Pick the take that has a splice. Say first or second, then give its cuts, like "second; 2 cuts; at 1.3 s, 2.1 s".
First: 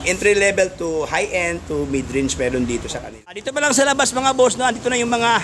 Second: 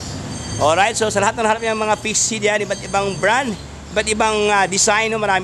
first; 1 cut; at 3.5 s